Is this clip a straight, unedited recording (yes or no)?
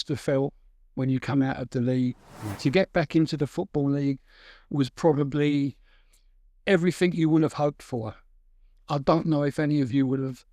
no